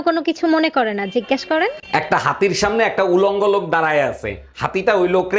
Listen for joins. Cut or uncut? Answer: uncut